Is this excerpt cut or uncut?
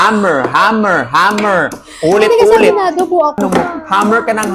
cut